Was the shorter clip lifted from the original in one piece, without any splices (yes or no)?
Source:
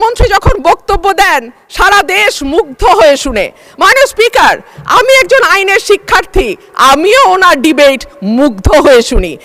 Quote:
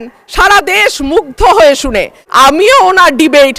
no